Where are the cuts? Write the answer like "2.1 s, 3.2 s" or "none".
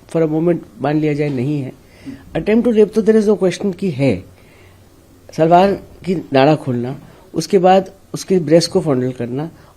none